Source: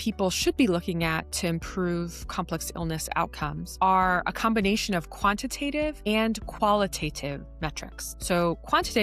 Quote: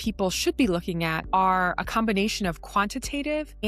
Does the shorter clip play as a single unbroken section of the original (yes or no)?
no